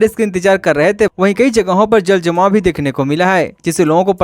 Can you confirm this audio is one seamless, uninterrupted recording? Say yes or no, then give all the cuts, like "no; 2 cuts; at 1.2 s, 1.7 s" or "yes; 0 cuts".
no; 1 cut; at 1.1 s